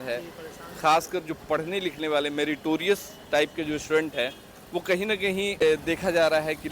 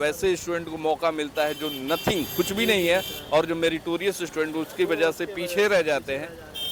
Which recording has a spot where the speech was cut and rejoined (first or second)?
first